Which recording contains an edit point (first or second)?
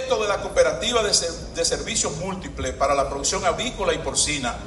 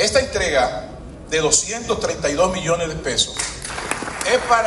second